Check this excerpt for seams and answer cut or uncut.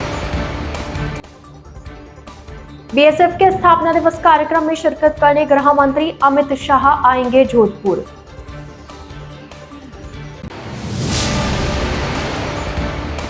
cut